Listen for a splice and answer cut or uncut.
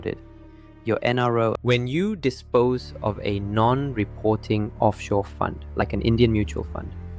cut